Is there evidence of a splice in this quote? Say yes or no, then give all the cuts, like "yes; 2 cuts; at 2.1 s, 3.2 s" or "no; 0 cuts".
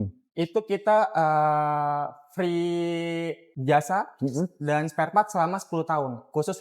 yes; 1 cut; at 3.5 s